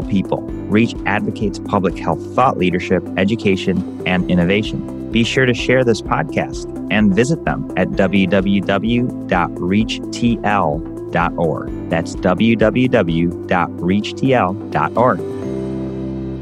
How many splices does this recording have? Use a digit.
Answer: 1